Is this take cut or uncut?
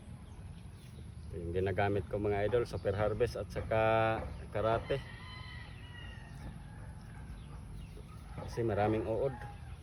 uncut